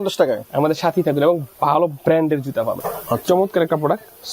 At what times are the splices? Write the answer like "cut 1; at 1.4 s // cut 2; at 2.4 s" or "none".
cut 1; at 2.9 s

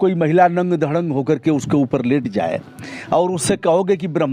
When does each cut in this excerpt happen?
none

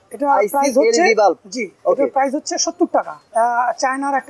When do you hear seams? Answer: cut 1; at 3.2 s

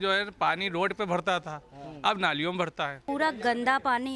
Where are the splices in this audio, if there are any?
cut 1; at 3.0 s

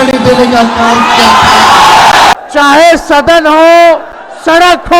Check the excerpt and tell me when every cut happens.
cut 1; at 2.3 s

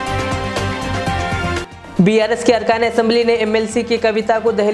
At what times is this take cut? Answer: cut 1; at 1.6 s

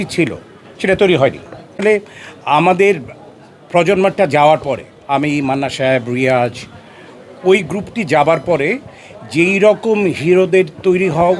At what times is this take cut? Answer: cut 1; at 1.8 s

